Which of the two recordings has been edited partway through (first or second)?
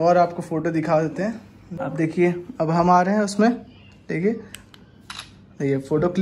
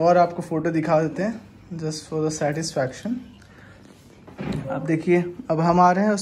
first